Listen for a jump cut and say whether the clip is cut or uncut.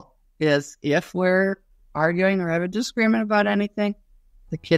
uncut